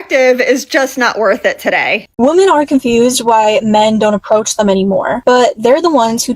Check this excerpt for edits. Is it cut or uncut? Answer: cut